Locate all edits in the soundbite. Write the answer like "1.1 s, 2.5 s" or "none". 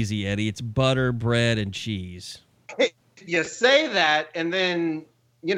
3.1 s